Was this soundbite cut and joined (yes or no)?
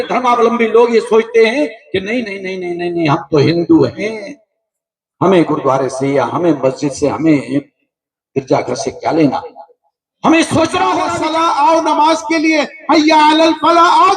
yes